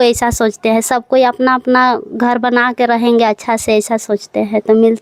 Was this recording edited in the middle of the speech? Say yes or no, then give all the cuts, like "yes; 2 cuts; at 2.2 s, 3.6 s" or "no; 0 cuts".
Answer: no; 0 cuts